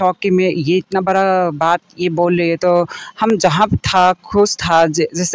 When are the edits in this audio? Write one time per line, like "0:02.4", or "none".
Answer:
none